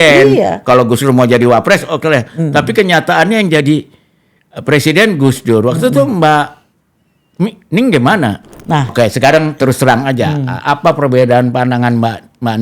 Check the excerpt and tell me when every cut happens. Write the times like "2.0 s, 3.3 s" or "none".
8.9 s